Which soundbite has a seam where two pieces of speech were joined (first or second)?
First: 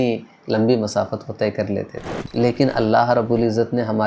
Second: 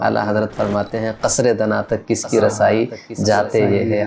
first